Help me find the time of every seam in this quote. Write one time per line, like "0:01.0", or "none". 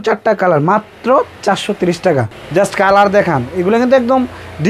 0:02.3